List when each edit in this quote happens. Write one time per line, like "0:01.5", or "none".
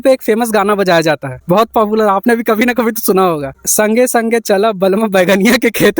0:03.6